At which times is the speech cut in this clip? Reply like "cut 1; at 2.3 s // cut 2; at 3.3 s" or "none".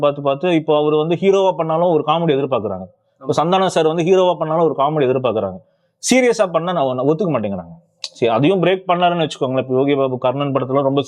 none